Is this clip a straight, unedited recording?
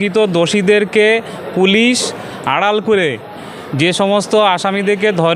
yes; 0 cuts

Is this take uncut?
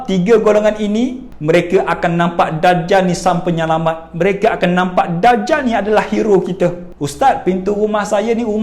no; 2 cuts; at 1.3 s, 6.9 s

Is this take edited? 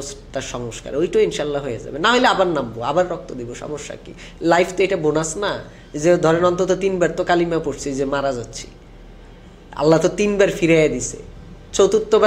no; 0 cuts

